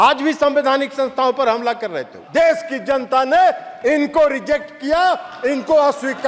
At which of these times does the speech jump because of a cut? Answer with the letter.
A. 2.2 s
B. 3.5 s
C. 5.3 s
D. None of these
A